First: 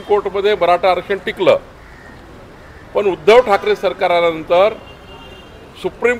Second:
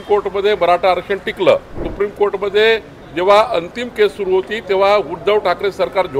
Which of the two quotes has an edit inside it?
second; 1 cut; at 1.8 s

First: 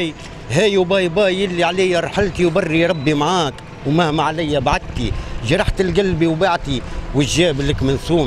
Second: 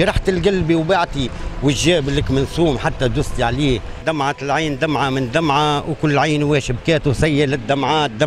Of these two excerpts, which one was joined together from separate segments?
second; 1 cut; at 4.0 s

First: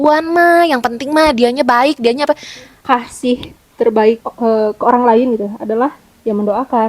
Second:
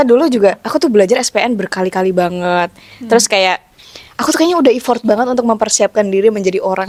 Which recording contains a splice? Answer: first; 1 cut; at 2.8 s

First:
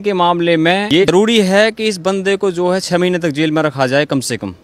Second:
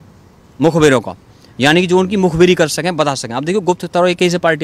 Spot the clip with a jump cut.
first; 1 cut; at 1.1 s

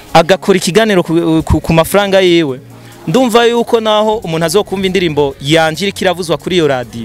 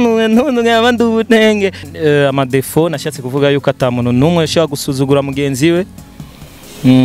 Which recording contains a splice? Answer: second; 1 cut; at 1.8 s

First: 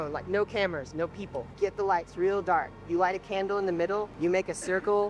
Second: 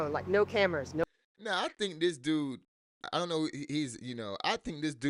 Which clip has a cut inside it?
first; 2 cuts; at 1.5 s, 4.1 s

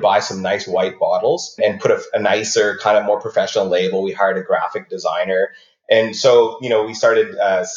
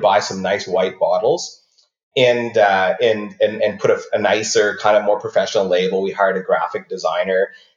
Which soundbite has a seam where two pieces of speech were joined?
first; 1 cut; at 1.6 s

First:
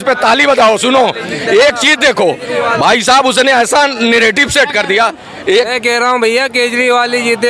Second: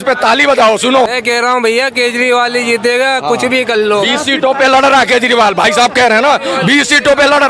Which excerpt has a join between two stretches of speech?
second; 1 cut; at 1.1 s

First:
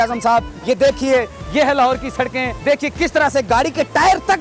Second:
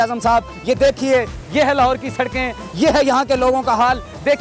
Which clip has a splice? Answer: first; 1 cut; at 2.5 s

